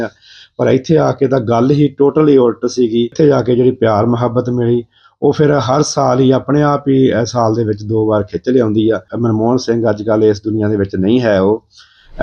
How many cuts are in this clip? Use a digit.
2